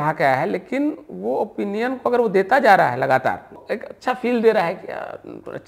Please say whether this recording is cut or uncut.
cut